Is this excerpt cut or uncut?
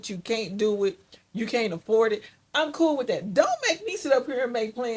uncut